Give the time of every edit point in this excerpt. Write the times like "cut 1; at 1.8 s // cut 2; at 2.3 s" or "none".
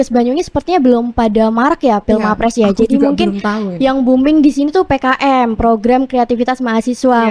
none

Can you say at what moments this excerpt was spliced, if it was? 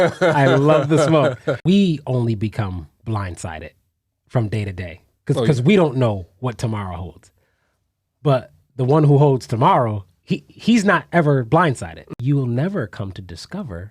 cut 1; at 1.5 s // cut 2; at 12.1 s

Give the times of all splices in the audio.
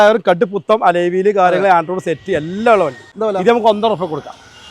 cut 1; at 3.1 s

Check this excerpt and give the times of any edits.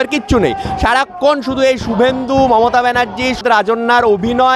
cut 1; at 3.4 s

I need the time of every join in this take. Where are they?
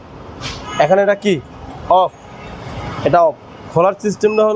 none

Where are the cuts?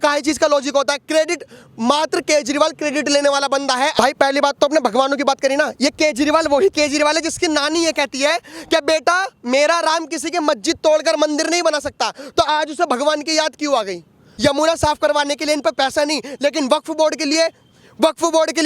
cut 1; at 3.9 s // cut 2; at 14.2 s

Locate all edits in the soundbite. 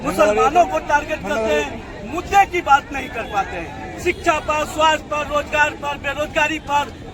none

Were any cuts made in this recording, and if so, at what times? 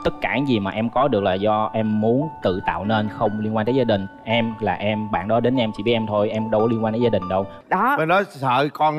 cut 1; at 7.6 s

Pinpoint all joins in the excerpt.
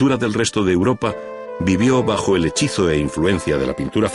cut 1; at 1.8 s

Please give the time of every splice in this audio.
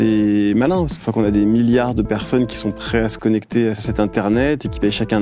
cut 1; at 1.0 s // cut 2; at 3.8 s

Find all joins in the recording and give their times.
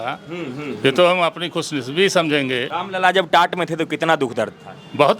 cut 1; at 2.7 s

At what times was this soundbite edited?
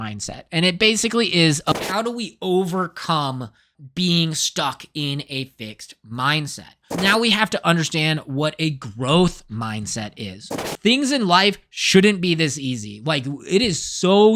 cut 1; at 1.8 s // cut 2; at 6.9 s // cut 3; at 10.7 s

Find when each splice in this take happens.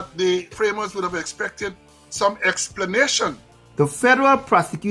cut 1; at 3.6 s

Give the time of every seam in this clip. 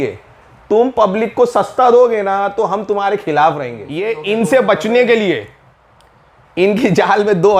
cut 1; at 4.2 s

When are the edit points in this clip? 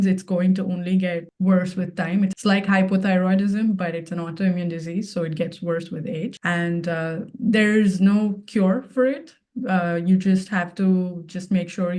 cut 1; at 1.3 s // cut 2; at 2.4 s // cut 3; at 6.4 s

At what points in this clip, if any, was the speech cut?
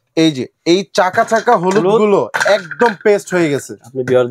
none

